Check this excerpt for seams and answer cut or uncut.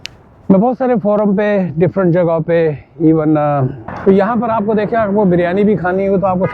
cut